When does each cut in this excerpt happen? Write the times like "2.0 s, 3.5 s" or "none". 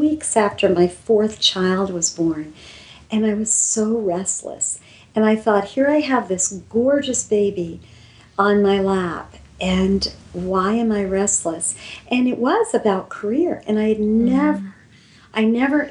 none